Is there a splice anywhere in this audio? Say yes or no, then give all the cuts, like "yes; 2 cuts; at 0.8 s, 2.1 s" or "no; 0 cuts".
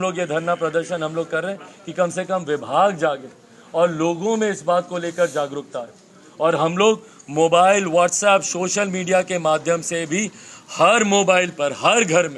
no; 0 cuts